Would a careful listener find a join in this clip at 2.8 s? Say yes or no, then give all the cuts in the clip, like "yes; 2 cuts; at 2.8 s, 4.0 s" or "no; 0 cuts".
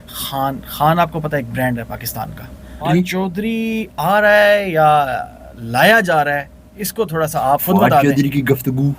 yes; 1 cut; at 2.8 s